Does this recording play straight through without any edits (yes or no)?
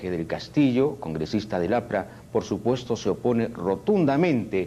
yes